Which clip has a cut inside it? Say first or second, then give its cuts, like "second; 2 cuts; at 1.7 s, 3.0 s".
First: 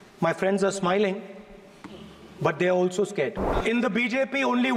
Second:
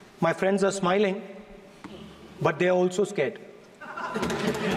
first; 1 cut; at 3.5 s